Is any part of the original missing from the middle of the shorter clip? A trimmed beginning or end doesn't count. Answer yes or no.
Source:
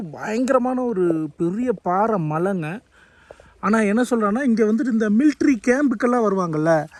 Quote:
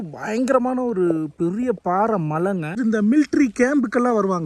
yes